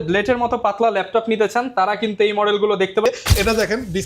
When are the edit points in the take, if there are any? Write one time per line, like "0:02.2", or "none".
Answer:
0:03.1